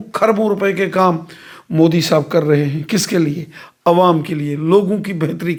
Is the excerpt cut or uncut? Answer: uncut